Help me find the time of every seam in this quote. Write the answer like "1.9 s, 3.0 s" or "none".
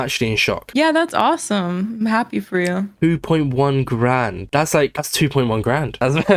none